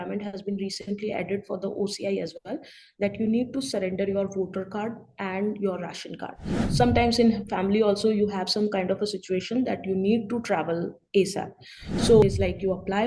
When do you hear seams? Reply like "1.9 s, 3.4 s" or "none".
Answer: 6.5 s, 12.2 s